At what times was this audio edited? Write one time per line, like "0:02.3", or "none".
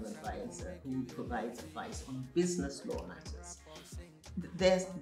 none